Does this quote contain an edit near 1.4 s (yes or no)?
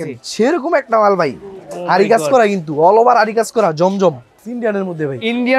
no